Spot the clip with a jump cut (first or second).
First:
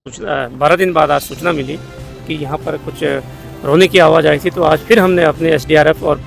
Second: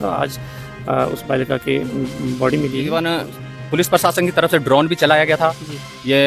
second